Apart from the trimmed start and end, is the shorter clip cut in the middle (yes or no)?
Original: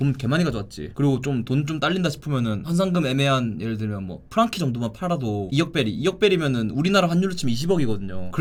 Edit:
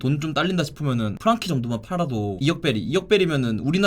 yes